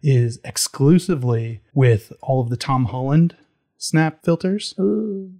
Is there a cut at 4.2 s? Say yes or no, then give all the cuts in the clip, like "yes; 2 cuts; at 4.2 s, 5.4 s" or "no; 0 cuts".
yes; 2 cuts; at 1.6 s, 4.2 s